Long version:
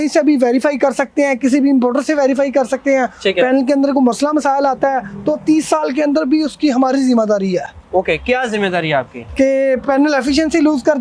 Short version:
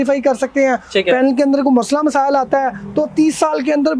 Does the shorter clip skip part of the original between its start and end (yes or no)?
no